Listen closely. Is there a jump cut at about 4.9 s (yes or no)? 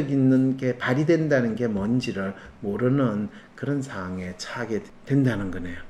yes